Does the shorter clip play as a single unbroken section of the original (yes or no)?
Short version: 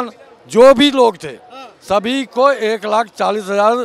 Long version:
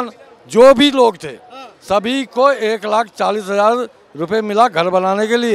yes